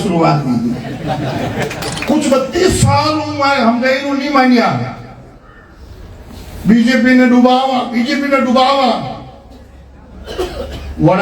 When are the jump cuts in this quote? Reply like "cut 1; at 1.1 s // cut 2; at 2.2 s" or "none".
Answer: cut 1; at 1.9 s

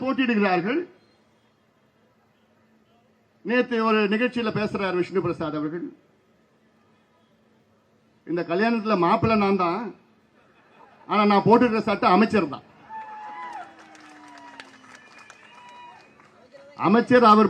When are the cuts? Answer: none

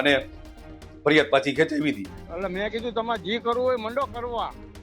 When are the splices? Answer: cut 1; at 2.3 s

